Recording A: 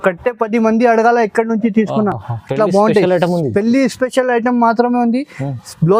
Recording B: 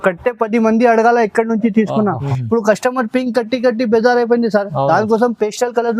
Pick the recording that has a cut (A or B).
B